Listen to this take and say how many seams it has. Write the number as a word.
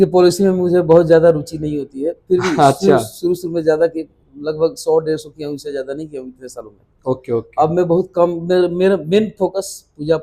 zero